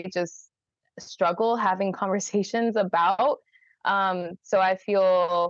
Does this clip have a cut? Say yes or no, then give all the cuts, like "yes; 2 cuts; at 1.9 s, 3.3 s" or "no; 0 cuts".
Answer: no; 0 cuts